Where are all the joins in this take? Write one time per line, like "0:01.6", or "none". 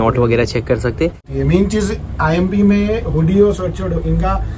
0:01.3